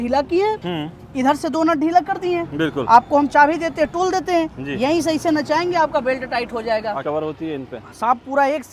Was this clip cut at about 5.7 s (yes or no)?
no